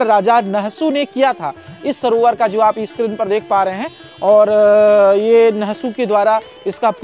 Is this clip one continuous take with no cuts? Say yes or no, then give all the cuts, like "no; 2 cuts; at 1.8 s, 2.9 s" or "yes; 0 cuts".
yes; 0 cuts